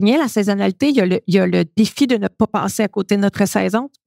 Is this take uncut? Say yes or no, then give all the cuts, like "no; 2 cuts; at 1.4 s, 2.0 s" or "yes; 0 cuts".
yes; 0 cuts